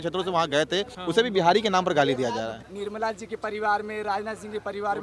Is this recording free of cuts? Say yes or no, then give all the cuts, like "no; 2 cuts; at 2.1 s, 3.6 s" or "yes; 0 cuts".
no; 2 cuts; at 0.9 s, 2.7 s